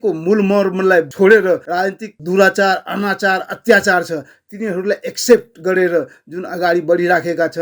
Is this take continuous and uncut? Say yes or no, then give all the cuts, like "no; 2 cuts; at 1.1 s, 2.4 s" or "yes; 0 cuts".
no; 2 cuts; at 1.1 s, 1.8 s